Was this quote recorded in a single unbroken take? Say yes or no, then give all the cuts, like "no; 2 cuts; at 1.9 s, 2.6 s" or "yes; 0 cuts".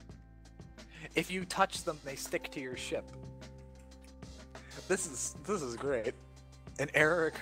no; 1 cut; at 0.9 s